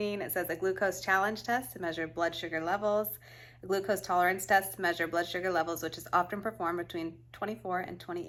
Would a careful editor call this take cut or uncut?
uncut